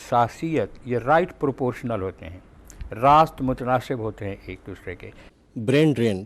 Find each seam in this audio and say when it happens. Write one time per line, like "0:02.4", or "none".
0:05.2